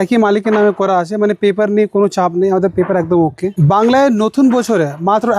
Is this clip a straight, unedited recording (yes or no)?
no